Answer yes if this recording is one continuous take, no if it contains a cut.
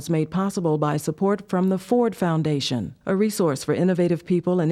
yes